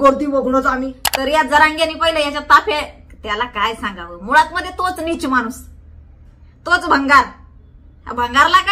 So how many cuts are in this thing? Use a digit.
1